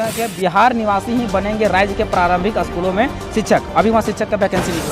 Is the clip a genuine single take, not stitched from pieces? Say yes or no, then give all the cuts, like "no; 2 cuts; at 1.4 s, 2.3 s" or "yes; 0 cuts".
yes; 0 cuts